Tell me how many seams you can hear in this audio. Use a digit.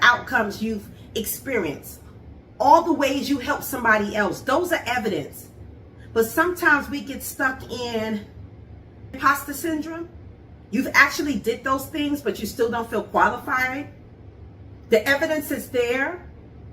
1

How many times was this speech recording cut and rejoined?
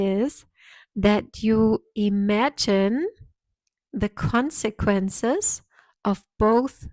0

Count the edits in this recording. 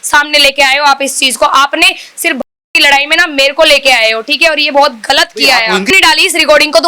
1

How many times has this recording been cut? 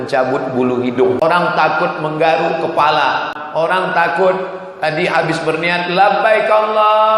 2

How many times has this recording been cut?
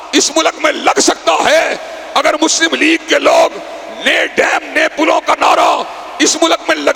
0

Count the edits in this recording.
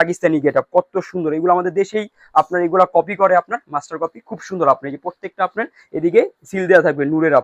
0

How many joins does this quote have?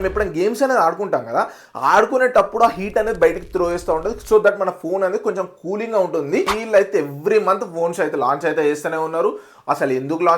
1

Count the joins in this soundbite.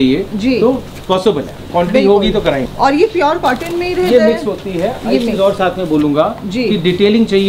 0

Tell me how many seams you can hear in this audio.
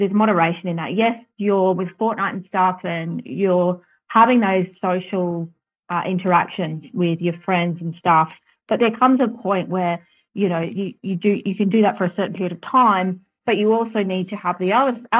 0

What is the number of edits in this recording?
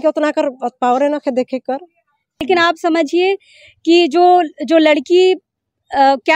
1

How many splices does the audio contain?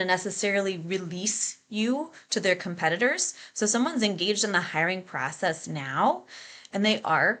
0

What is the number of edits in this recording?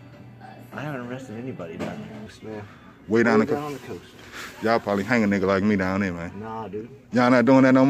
1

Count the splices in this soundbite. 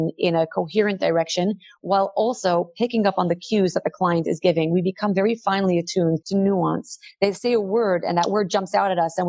0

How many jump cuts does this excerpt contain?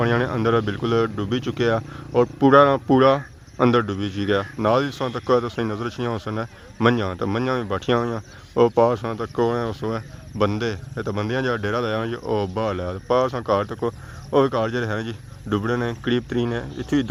0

